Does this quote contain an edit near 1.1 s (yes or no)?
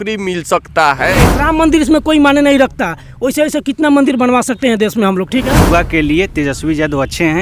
yes